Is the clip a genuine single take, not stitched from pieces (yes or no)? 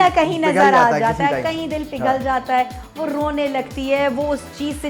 yes